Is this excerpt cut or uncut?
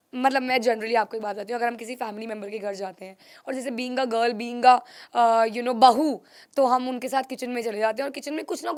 uncut